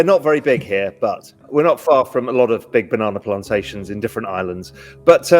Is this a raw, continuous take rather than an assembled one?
no; 1 cut; at 1.3 s

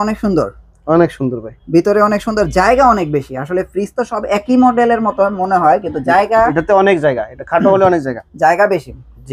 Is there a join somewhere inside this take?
no; 0 cuts

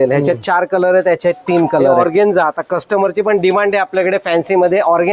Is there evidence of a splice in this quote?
yes; 1 cut; at 1.9 s

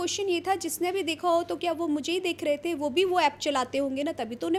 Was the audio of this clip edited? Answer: no; 0 cuts

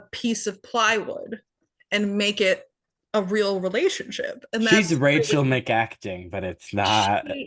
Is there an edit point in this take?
no; 0 cuts

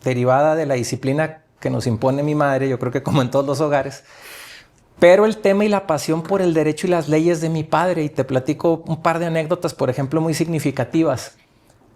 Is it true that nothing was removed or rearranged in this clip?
yes; 0 cuts

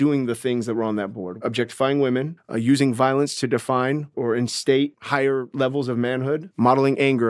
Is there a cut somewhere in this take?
yes; 5 cuts; at 1.2 s, 2.4 s, 4.1 s, 5.0 s, 6.5 s

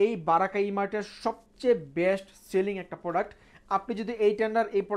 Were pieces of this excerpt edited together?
no; 0 cuts

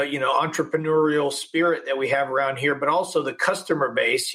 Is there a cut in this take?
no; 0 cuts

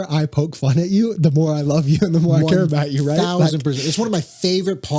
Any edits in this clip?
no; 0 cuts

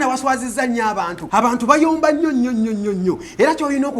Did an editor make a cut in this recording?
yes; 1 cut; at 1.2 s

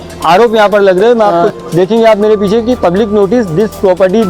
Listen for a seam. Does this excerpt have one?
yes; 1 cut; at 1.4 s

